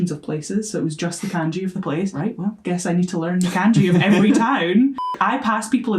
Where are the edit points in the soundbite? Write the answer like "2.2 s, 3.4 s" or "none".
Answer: 2.2 s, 5.1 s